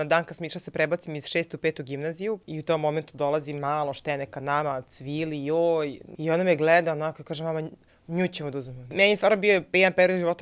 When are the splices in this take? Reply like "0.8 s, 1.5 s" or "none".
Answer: 2.5 s, 6.0 s, 8.9 s

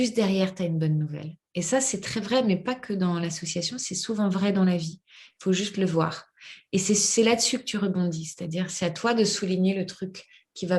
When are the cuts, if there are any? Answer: none

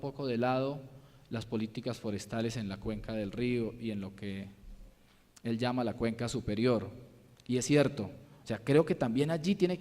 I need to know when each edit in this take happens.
2.3 s

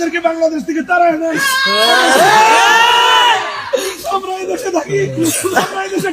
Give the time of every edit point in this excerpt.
none

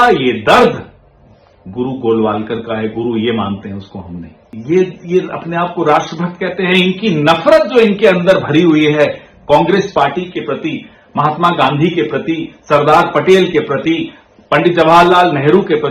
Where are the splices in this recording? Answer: 4.5 s

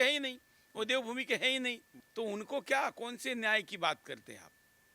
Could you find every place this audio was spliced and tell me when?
none

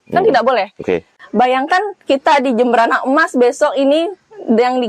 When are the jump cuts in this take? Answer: 1.2 s

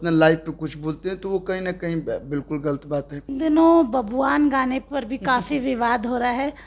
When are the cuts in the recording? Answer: 3.2 s

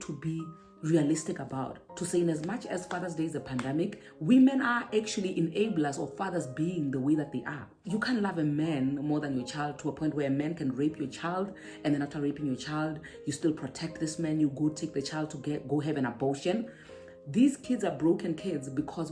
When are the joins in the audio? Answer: 4.1 s, 7.8 s

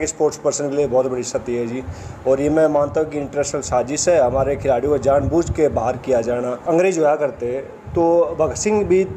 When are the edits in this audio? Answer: 6.6 s

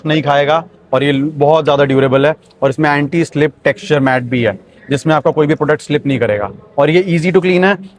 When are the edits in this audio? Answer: none

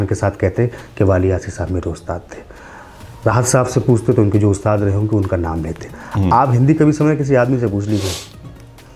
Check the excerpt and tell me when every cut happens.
none

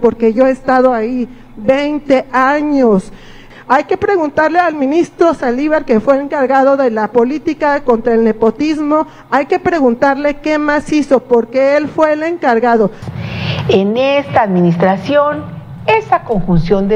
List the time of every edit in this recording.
3.5 s, 13.0 s

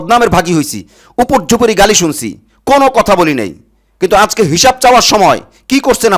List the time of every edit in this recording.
none

